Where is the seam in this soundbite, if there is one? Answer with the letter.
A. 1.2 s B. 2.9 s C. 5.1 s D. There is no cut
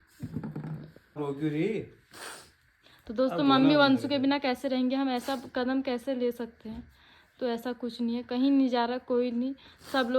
A